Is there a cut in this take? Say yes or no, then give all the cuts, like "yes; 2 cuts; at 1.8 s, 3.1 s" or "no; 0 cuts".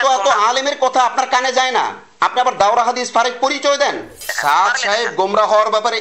yes; 1 cut; at 4.2 s